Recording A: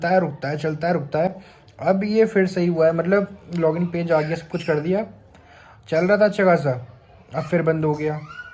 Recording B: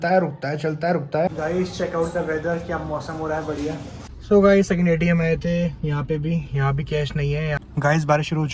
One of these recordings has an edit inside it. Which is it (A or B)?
B